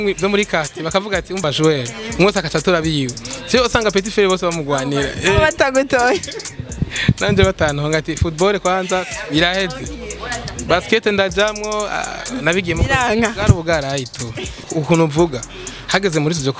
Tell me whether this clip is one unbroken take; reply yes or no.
no